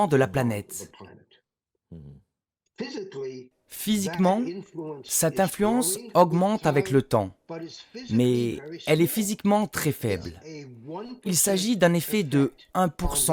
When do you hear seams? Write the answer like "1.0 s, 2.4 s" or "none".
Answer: none